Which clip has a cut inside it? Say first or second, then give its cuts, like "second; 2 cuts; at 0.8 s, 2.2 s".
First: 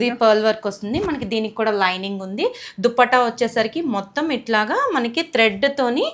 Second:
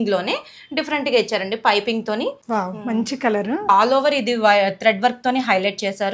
second; 2 cuts; at 2.4 s, 3.7 s